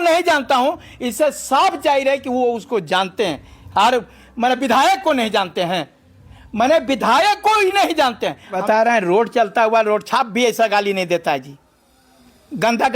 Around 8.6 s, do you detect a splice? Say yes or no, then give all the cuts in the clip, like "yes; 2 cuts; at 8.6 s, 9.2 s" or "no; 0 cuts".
yes; 1 cut; at 8.6 s